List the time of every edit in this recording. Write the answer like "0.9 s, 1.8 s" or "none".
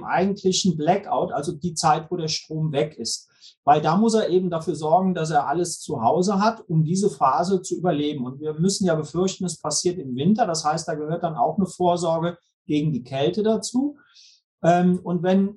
none